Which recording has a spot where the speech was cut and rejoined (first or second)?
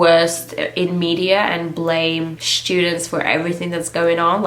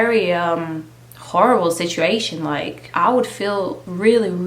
second